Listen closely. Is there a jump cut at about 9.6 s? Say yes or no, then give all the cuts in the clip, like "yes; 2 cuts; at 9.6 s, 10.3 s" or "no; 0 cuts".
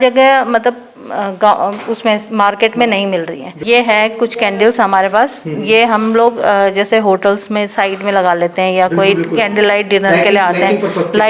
no; 1 cut; at 3.5 s